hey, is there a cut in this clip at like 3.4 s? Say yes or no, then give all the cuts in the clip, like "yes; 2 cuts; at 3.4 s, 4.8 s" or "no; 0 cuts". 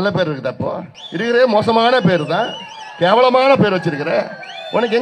no; 1 cut; at 1.0 s